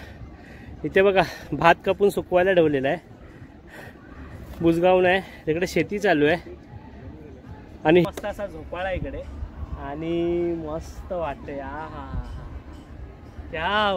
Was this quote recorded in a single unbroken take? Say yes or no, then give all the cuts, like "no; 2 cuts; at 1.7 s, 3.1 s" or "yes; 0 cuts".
no; 1 cut; at 8.0 s